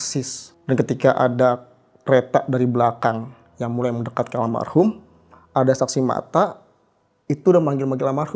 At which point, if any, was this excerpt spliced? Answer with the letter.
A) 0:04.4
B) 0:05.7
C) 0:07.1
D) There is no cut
D